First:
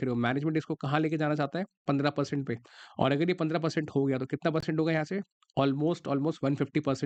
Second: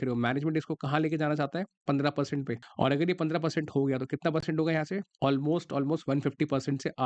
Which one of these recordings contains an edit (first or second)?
second